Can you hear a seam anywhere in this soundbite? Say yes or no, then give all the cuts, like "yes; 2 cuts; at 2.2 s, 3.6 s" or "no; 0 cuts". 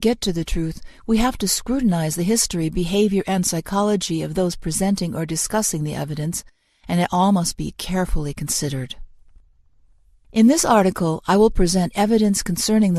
no; 0 cuts